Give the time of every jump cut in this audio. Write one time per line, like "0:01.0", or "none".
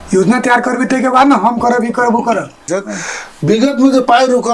0:02.7